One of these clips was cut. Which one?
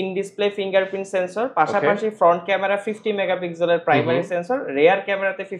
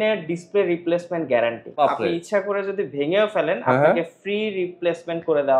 second; 1 cut; at 1.7 s

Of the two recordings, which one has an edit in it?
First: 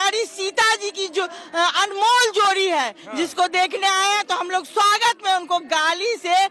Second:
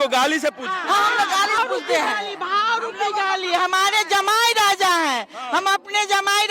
second; 1 cut; at 1.6 s

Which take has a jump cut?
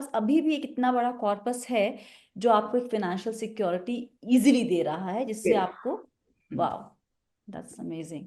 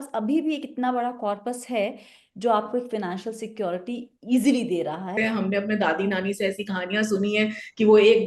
second; 1 cut; at 5.1 s

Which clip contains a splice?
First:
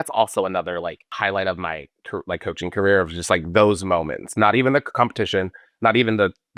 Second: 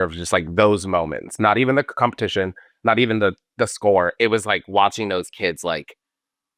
first; 1 cut; at 1.1 s

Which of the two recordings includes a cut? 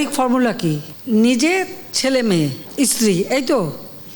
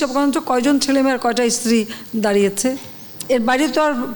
first; 2 cuts; at 0.9 s, 2.6 s

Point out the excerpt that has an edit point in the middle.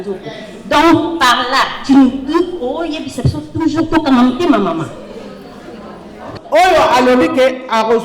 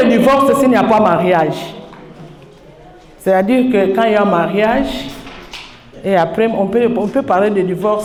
first; 1 cut; at 6.3 s

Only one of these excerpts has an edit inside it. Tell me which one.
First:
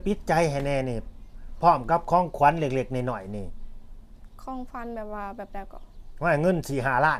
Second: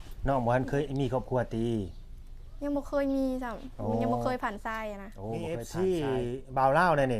second; 1 cut; at 5.5 s

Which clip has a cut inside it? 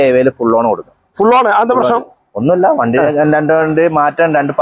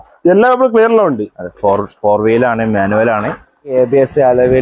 second; 1 cut; at 3.7 s

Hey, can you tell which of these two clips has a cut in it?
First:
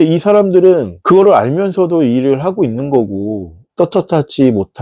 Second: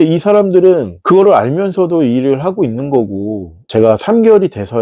second; 1 cut; at 3.5 s

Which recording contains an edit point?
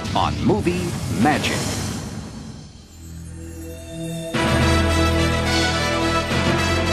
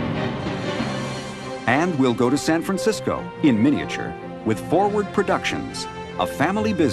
second; 1 cut; at 5.7 s

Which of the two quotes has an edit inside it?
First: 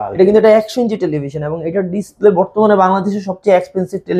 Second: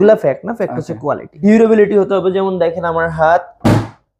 second; 1 cut; at 1.4 s

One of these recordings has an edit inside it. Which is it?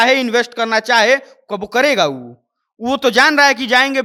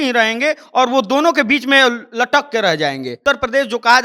second; 1 cut; at 3.1 s

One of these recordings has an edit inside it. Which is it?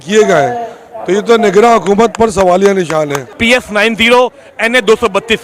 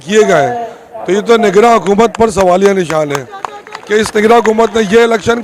first; 1 cut; at 3.3 s

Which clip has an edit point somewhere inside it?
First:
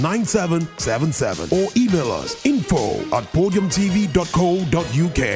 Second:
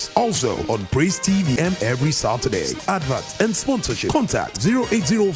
second; 1 cut; at 1.6 s

